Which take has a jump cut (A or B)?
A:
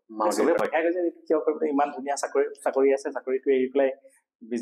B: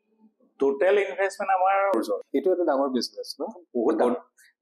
B